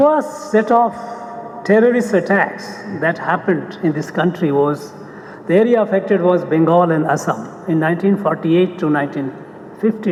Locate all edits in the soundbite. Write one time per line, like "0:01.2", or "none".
none